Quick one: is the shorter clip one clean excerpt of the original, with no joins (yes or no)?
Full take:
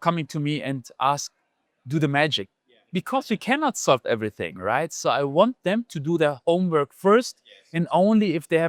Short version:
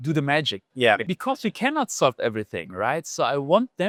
yes